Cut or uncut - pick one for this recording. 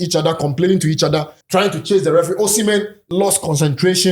cut